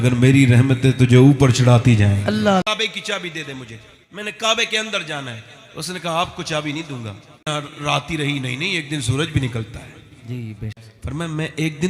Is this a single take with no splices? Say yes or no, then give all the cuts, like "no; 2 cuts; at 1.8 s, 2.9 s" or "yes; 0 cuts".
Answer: no; 3 cuts; at 2.6 s, 7.5 s, 10.9 s